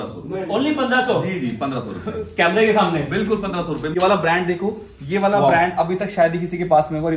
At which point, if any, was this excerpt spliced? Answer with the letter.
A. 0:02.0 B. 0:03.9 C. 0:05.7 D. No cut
B